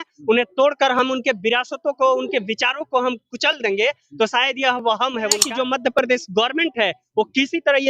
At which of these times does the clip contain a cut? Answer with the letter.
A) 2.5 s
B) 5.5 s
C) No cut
B